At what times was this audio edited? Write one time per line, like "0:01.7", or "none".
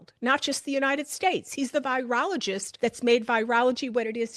0:02.7